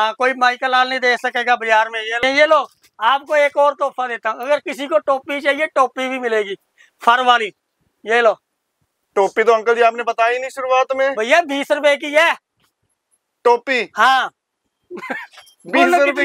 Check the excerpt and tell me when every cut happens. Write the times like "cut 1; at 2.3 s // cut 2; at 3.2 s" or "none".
cut 1; at 2.2 s